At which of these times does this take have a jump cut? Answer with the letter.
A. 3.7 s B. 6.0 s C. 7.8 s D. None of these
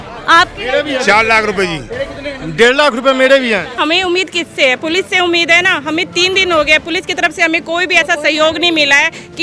A